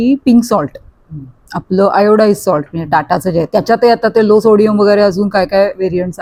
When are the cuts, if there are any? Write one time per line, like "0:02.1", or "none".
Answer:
none